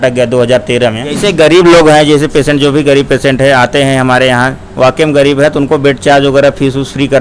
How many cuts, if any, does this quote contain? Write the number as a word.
one